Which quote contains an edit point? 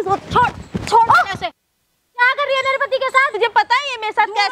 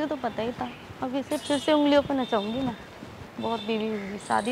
first; 1 cut; at 3.3 s

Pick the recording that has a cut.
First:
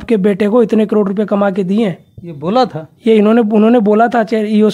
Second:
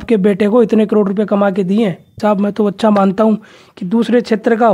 second; 1 cut; at 2.1 s

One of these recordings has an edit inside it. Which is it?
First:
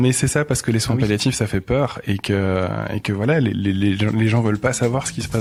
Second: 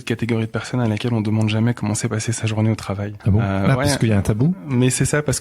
second; 1 cut; at 3.1 s

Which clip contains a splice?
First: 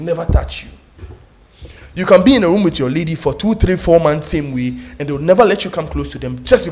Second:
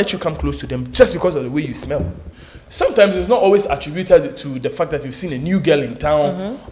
second; 1 cut; at 2.2 s

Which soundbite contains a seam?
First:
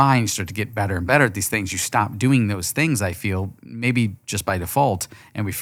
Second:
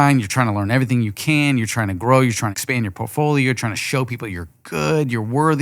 second; 1 cut; at 2.6 s

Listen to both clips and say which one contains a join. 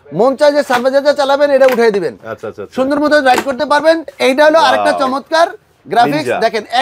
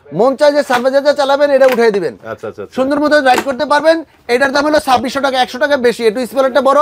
first; 1 cut; at 4.1 s

